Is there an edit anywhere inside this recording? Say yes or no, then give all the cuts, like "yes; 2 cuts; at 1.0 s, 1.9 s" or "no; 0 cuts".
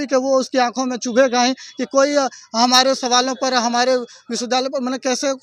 no; 0 cuts